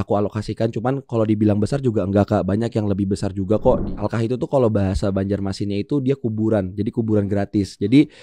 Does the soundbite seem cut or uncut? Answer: cut